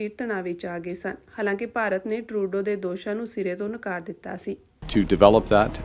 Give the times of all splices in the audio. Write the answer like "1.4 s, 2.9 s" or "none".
4.7 s